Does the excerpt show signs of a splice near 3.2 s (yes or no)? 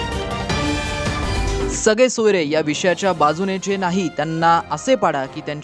no